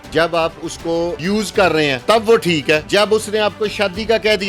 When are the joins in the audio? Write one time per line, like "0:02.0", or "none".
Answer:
0:01.2
0:02.0
0:02.9